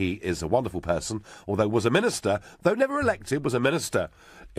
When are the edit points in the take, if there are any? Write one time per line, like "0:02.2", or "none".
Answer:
none

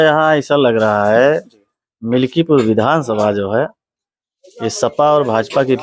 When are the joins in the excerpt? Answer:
none

